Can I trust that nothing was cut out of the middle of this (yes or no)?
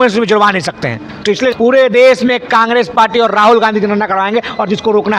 no